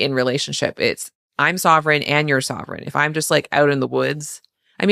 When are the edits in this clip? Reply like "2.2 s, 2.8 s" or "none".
1.2 s